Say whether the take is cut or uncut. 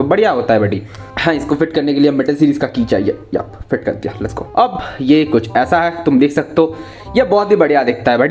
cut